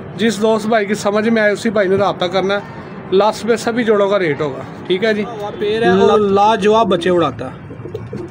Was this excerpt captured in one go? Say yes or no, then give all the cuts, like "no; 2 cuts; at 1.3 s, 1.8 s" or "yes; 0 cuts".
no; 1 cut; at 5.6 s